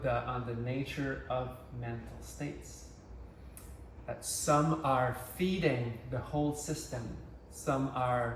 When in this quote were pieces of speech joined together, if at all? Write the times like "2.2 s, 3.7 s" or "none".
none